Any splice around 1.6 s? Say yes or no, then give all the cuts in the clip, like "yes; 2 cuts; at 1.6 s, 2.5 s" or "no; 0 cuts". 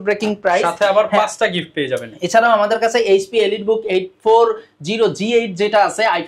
no; 0 cuts